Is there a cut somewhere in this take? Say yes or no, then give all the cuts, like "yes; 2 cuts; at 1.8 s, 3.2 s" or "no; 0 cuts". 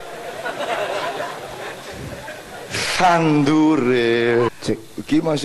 yes; 1 cut; at 4.5 s